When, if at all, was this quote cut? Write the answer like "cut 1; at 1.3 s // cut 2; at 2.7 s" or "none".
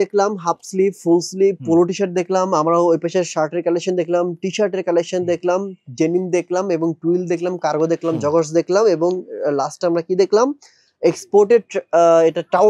none